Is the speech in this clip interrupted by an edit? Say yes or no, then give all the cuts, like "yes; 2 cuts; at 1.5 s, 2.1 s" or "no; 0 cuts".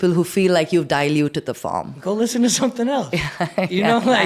no; 0 cuts